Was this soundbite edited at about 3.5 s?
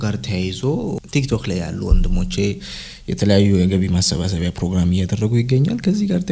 no; 1 cut; at 1.0 s

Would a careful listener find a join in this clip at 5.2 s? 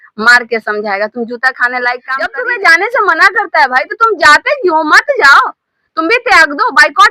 no; 1 cut; at 2.2 s

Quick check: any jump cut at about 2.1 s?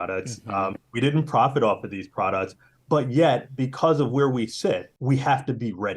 no; 1 cut; at 4.9 s

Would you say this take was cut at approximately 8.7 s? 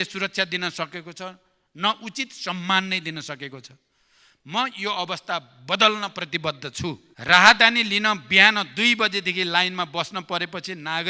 no; 1 cut; at 7.1 s

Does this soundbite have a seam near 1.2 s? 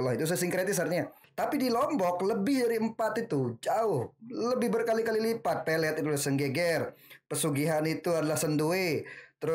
yes; 1 cut; at 1.2 s

